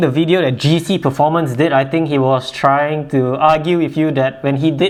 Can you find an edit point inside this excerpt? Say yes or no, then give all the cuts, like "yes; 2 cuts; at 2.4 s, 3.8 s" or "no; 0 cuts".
no; 0 cuts